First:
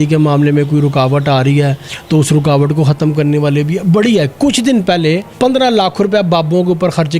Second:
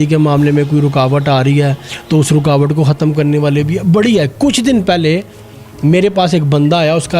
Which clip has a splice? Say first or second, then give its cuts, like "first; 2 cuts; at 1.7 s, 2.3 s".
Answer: first; 1 cut; at 5.3 s